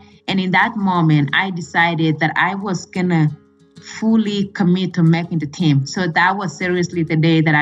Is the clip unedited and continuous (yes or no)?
yes